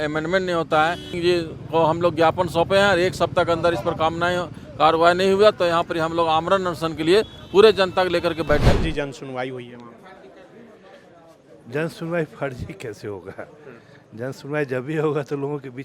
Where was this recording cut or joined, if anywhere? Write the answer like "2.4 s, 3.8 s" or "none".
1.1 s, 8.7 s